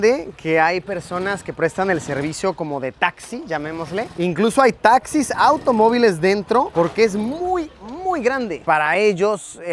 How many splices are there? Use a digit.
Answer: 2